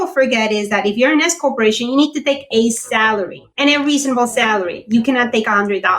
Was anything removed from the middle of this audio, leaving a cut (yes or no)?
yes